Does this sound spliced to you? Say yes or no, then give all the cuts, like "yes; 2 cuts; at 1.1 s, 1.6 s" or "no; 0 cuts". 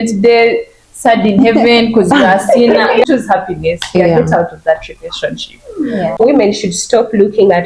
yes; 2 cuts; at 3.0 s, 6.1 s